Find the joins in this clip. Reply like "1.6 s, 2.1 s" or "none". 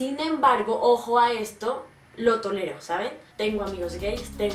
1.2 s, 3.2 s